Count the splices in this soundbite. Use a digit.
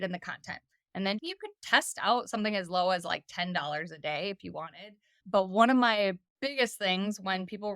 3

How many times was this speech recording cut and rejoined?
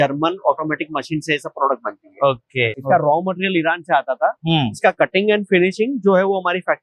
1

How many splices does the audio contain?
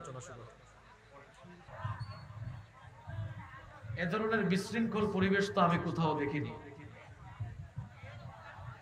1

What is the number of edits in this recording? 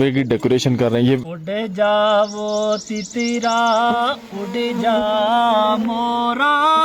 1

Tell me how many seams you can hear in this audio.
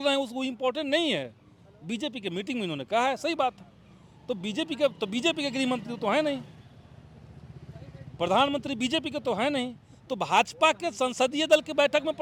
0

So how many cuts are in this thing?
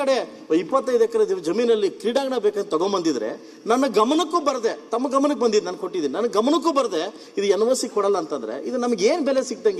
0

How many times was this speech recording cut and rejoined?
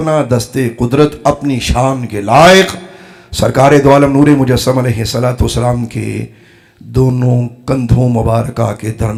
0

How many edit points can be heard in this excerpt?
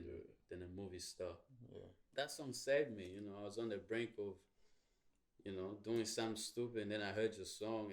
1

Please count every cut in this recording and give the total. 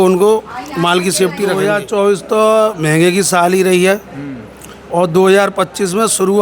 1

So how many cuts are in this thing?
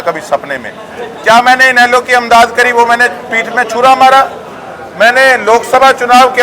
0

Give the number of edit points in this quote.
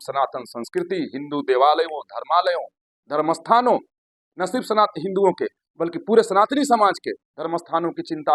0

